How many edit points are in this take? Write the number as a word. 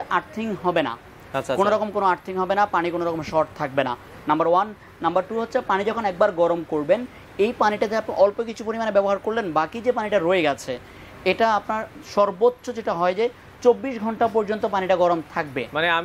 zero